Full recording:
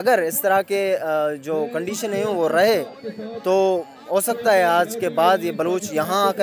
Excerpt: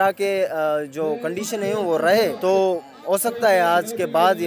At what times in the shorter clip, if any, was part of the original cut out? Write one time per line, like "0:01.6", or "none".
0:02.4